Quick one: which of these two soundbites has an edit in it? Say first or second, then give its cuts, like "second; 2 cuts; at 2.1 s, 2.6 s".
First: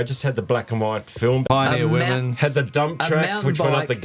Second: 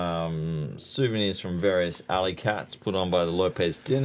first; 1 cut; at 1.4 s